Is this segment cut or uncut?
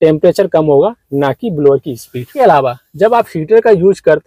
cut